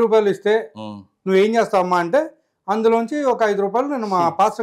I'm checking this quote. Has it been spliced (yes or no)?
no